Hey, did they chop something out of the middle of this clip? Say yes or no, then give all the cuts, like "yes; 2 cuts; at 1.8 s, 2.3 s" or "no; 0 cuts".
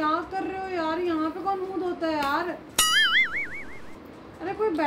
no; 0 cuts